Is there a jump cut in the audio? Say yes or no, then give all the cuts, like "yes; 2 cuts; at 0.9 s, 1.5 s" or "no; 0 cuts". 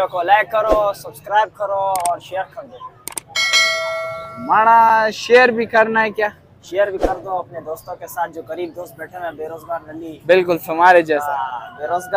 no; 0 cuts